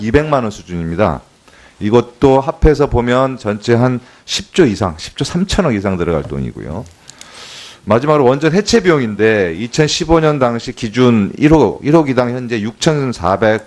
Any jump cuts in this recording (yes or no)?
no